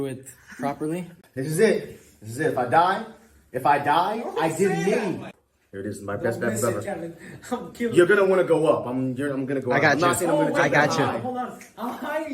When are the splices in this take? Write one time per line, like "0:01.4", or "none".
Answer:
0:01.2
0:05.3